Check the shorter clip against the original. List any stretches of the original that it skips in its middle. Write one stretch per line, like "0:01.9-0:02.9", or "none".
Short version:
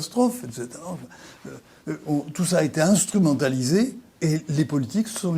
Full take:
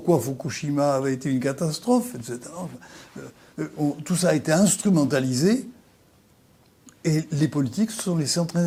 0:05.8-0:06.9